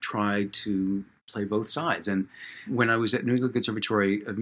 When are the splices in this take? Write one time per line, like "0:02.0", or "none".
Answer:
0:01.2
0:02.7